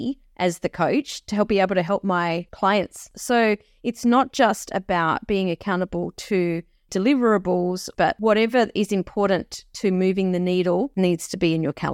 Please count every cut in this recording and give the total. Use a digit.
3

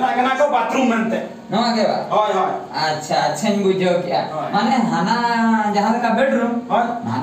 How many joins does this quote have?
0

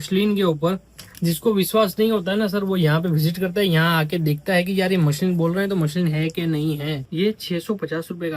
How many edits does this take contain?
1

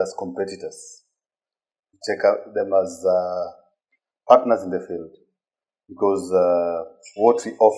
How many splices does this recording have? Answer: 0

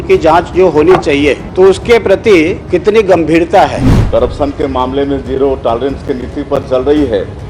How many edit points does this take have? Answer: 3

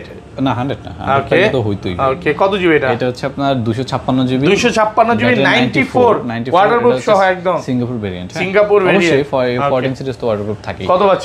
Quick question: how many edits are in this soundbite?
0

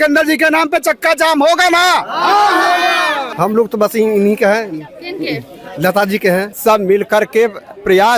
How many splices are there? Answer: 2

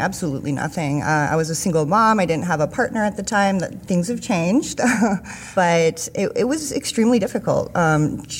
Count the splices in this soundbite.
1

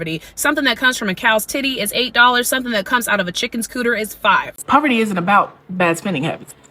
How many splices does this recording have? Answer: 1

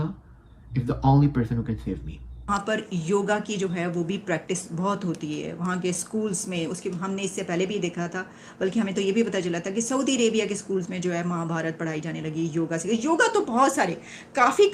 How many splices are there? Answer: 1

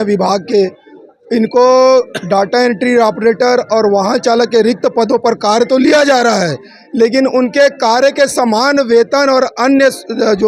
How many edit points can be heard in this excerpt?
0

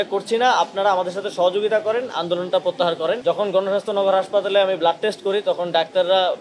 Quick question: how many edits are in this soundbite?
1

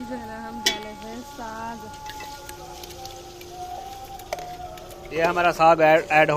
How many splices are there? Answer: 0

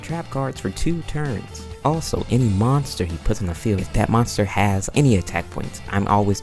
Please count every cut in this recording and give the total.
2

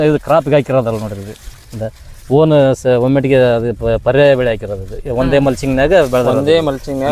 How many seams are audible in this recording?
0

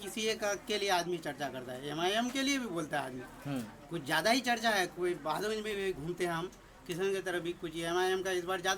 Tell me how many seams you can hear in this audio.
0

